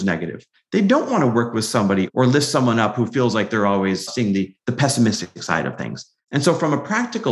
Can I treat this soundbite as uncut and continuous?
no; 2 cuts; at 2.1 s, 4.1 s

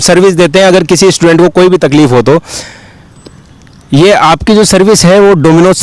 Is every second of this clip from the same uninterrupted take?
yes; 0 cuts

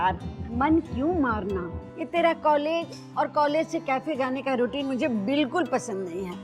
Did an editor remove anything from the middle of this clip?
yes; 1 cut; at 2.1 s

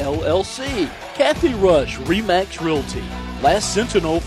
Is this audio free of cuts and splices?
no; 1 cut; at 1.0 s

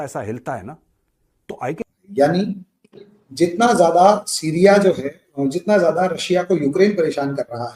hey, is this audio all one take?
no; 1 cut; at 1.8 s

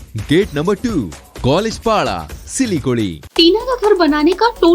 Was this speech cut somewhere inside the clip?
yes; 1 cut; at 3.2 s

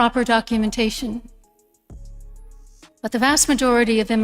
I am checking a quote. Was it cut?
yes; 2 cuts; at 1.3 s, 2.7 s

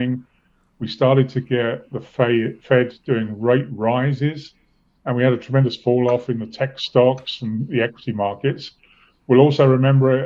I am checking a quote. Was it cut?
no; 0 cuts

